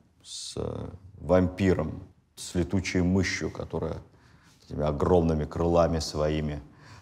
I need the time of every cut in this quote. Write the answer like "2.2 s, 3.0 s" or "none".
none